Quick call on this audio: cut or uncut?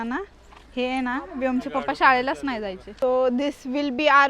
cut